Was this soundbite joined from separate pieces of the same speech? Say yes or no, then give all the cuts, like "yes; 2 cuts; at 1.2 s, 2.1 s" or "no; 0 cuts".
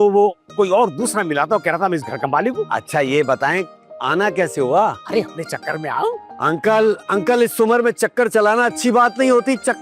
no; 0 cuts